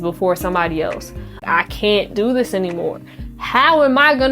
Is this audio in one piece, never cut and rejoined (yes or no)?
no